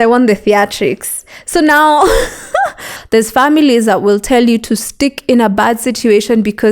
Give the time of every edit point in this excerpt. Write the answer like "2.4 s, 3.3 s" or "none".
2.9 s